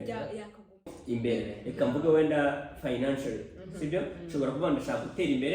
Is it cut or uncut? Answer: cut